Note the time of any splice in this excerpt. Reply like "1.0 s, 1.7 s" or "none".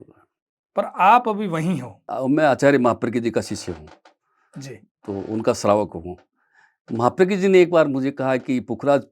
2.1 s